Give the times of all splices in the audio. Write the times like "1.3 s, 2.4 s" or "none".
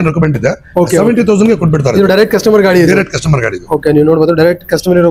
none